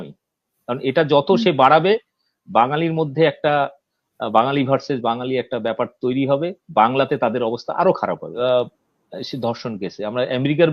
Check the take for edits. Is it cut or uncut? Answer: cut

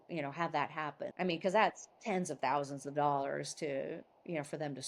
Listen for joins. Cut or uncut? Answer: cut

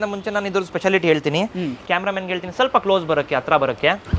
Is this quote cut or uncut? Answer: cut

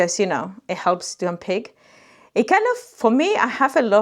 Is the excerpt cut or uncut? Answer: uncut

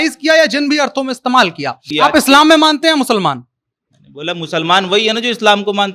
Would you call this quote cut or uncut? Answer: cut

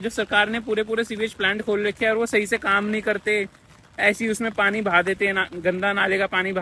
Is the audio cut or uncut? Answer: uncut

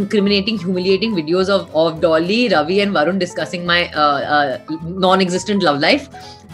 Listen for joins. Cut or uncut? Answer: uncut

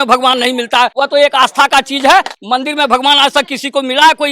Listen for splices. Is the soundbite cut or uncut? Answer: cut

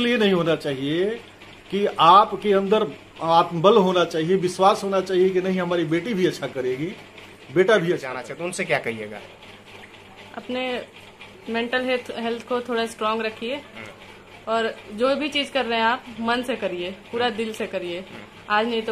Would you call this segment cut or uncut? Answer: cut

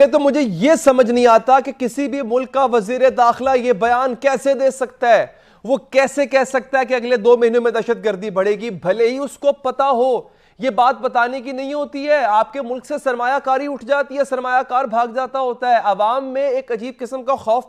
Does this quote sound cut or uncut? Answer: uncut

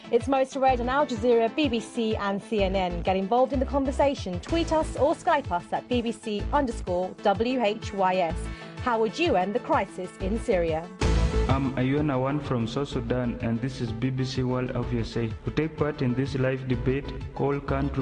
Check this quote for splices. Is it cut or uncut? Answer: uncut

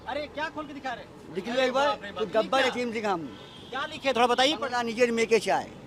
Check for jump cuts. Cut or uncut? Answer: uncut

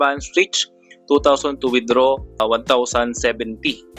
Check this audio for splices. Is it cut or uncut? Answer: cut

